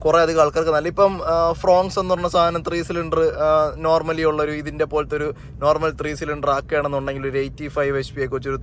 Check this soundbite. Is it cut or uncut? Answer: uncut